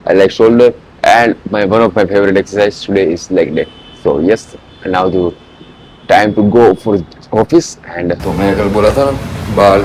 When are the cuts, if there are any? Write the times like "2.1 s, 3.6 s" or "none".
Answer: none